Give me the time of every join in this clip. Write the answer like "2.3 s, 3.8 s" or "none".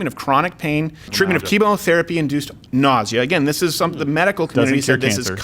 1.1 s